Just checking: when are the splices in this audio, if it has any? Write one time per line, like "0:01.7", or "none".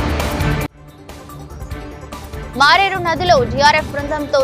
0:02.2